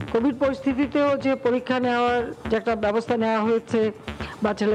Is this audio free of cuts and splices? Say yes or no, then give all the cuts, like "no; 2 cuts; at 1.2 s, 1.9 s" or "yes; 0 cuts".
yes; 0 cuts